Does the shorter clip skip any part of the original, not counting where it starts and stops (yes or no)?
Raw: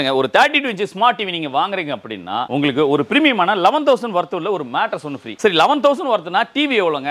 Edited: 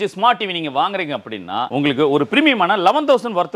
no